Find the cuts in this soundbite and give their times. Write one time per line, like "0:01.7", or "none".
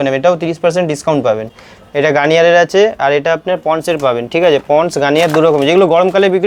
0:01.6